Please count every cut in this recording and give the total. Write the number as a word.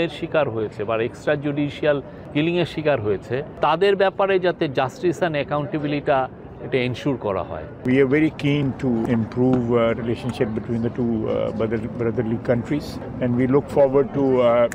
five